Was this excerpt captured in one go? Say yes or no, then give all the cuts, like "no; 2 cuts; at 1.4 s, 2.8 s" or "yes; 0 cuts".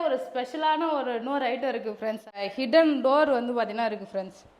no; 1 cut; at 2.4 s